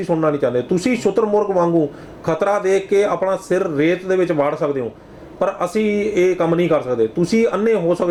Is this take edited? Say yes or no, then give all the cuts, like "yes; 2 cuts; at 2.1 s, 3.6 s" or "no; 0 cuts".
no; 0 cuts